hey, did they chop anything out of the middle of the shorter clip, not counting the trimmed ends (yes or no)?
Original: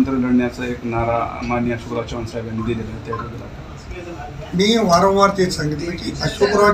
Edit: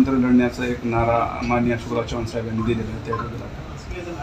no